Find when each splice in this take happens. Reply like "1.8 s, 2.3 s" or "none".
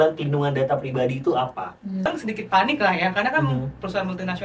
2.1 s